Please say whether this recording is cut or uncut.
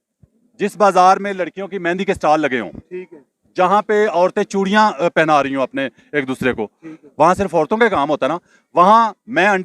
uncut